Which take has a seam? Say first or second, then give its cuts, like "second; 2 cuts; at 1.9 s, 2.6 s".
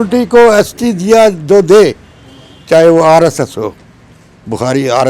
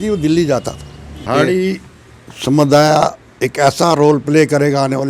second; 1 cut; at 1.2 s